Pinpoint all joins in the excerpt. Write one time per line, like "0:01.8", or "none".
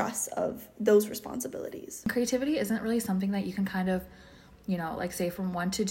0:02.1